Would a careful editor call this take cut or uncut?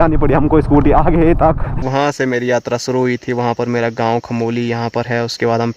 cut